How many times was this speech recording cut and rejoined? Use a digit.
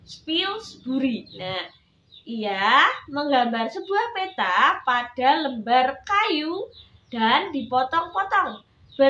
1